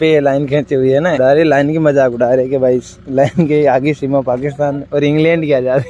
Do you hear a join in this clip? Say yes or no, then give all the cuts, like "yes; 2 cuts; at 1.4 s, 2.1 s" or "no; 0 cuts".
no; 0 cuts